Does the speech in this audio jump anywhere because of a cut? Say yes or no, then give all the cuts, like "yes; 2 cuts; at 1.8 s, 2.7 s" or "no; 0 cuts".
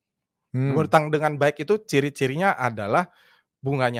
no; 0 cuts